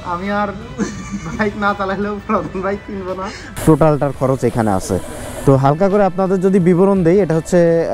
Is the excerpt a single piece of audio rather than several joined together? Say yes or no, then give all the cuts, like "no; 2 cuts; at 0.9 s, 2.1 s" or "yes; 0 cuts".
no; 1 cut; at 3.6 s